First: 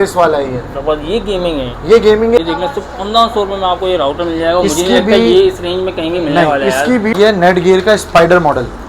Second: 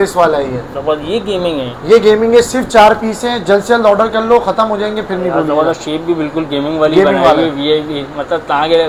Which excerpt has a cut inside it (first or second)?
first